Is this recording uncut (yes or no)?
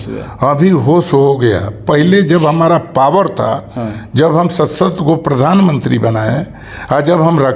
yes